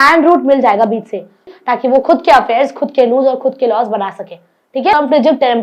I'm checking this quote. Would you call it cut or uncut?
cut